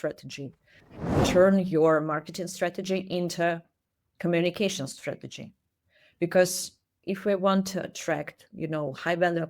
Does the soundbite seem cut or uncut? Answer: cut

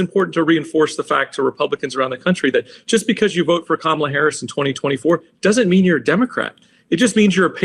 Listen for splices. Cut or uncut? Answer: uncut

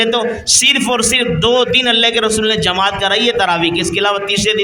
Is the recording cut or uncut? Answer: uncut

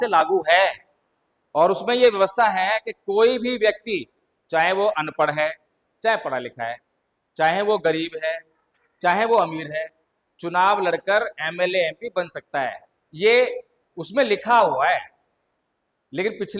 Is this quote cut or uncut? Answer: uncut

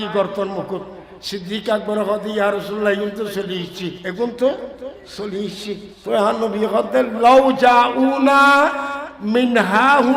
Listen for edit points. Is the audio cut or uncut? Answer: cut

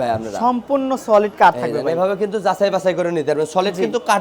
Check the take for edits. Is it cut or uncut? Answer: uncut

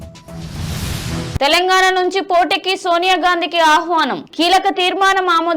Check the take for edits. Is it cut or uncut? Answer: cut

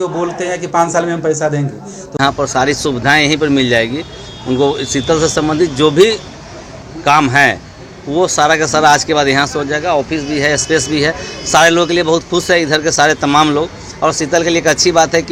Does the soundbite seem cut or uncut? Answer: uncut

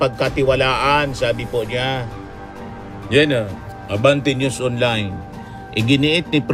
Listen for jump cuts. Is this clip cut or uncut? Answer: uncut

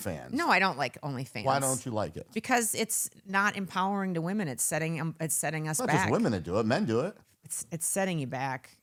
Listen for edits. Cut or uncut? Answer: uncut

